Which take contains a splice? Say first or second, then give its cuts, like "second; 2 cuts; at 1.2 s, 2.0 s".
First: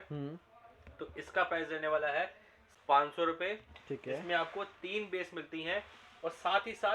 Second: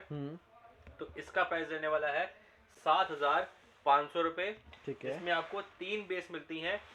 first; 1 cut; at 2.6 s